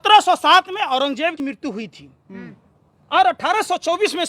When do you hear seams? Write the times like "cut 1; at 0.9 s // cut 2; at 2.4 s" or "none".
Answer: cut 1; at 1.4 s